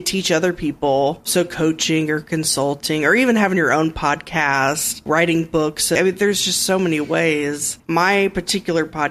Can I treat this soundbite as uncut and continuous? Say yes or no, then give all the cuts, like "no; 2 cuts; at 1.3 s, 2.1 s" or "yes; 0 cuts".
no; 3 cuts; at 5.0 s, 6.0 s, 7.7 s